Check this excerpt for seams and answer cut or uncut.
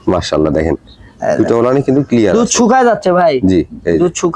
uncut